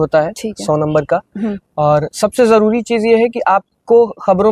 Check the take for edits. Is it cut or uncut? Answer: uncut